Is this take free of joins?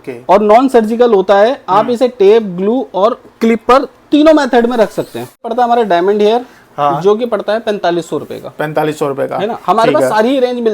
no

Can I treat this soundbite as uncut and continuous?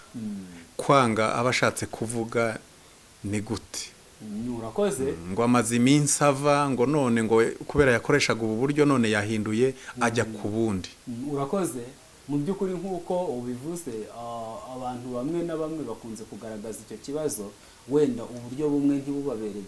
yes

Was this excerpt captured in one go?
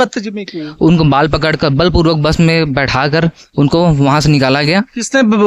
yes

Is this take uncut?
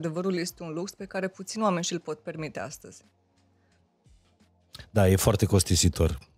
yes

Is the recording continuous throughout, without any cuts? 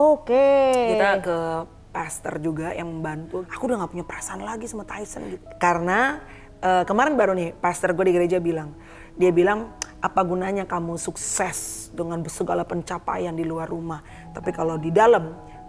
no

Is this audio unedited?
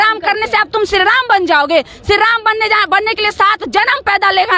yes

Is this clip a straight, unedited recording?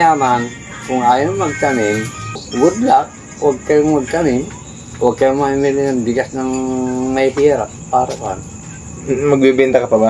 no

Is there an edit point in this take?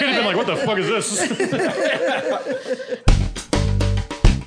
yes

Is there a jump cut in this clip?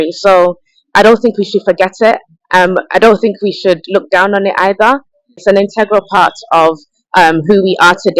no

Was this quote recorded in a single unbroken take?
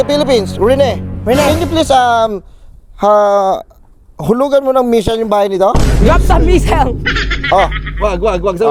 yes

